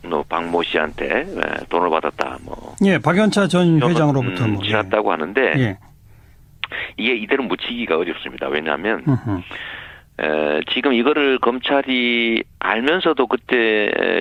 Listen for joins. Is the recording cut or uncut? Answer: uncut